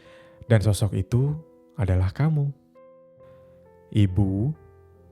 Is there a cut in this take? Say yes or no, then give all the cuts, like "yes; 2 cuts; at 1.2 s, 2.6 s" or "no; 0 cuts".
yes; 1 cut; at 3.3 s